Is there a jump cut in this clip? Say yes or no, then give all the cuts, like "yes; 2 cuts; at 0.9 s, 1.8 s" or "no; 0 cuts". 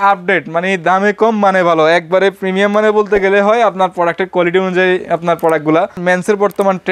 yes; 1 cut; at 6.0 s